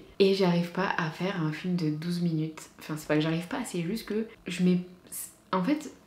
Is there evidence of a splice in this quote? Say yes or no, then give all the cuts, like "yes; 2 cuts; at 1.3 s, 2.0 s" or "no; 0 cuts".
yes; 1 cut; at 4.4 s